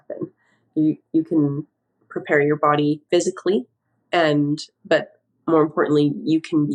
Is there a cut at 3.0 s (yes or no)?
yes